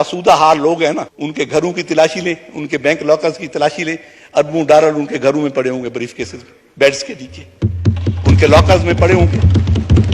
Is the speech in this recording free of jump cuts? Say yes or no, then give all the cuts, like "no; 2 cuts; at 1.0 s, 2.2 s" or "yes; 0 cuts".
no; 1 cut; at 1.2 s